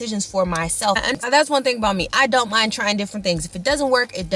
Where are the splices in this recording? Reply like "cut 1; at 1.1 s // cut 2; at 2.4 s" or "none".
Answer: cut 1; at 1.1 s

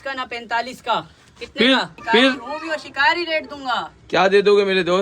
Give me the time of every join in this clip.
cut 1; at 2.5 s

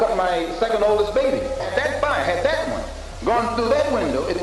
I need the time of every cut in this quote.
cut 1; at 1.7 s

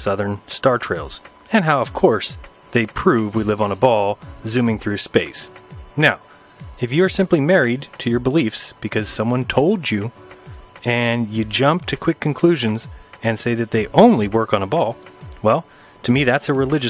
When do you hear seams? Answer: cut 1; at 9.9 s

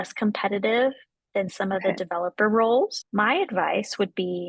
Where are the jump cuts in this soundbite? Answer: cut 1; at 3.0 s

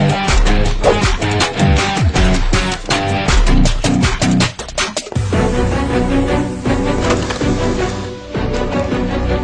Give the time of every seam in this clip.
cut 1; at 7.3 s

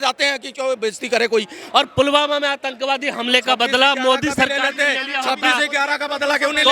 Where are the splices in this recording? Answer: cut 1; at 1.6 s

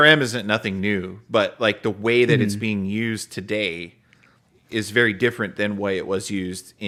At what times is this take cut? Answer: none

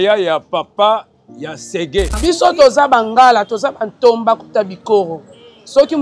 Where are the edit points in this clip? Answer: cut 1; at 2.2 s

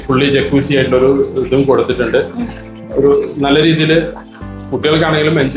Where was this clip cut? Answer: none

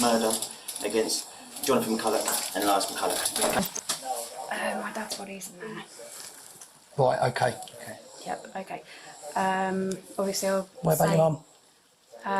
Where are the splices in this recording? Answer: cut 1; at 3.6 s

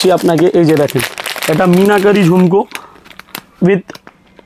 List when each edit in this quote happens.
none

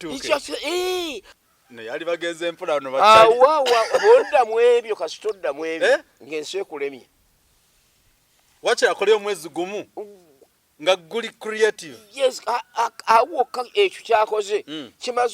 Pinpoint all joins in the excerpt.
cut 1; at 1.3 s

